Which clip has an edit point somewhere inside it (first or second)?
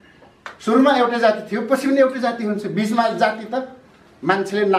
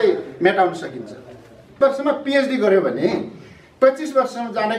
second